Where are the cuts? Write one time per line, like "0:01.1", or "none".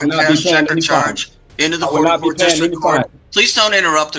none

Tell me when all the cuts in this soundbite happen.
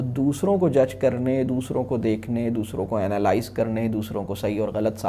none

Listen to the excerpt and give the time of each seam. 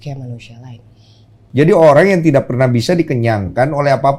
0:01.4

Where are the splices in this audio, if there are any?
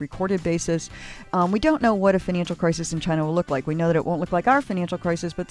0:01.3

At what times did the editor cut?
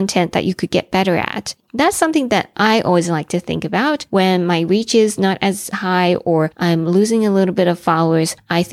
0:01.4

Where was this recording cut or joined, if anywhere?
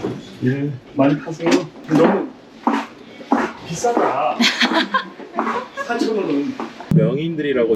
0:06.9

